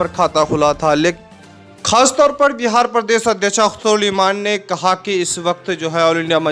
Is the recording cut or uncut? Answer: cut